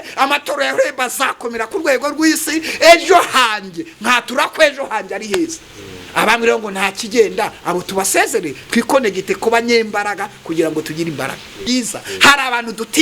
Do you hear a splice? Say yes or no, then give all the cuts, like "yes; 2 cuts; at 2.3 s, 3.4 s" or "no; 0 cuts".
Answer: yes; 1 cut; at 11.6 s